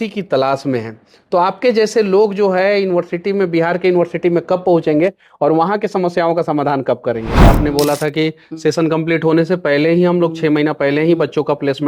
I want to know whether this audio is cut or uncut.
cut